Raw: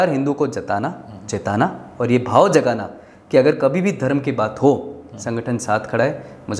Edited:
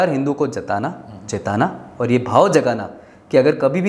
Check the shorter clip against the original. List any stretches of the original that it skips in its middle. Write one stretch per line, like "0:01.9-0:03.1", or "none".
none